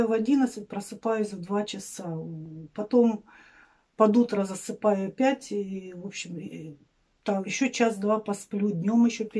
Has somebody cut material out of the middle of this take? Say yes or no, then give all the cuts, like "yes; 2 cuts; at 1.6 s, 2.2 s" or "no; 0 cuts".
no; 0 cuts